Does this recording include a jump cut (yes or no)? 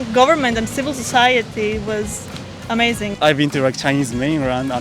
yes